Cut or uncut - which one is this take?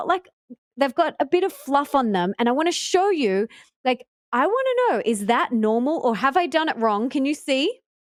uncut